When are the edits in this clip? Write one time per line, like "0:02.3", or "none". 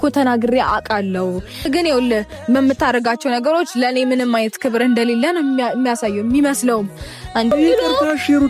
0:01.7
0:07.5

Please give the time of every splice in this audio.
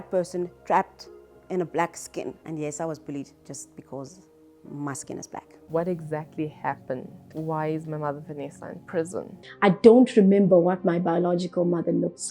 0:02.4
0:05.6
0:07.2
0:09.4

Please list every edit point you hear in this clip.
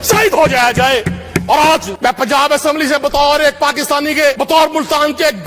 0:01.9
0:04.4

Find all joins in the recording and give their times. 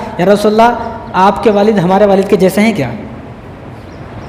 none

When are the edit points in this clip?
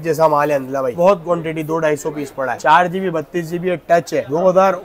0:00.9
0:02.5

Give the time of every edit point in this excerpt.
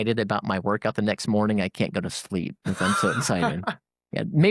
none

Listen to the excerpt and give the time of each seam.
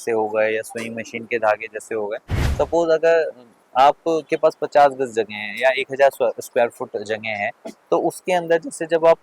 0:02.4

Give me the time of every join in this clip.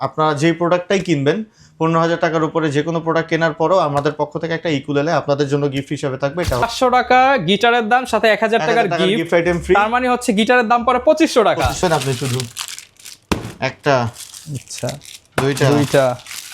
0:06.7
0:11.8

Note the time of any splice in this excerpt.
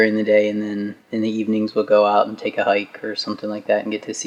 none

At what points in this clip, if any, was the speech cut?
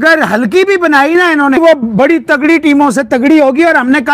0:01.6

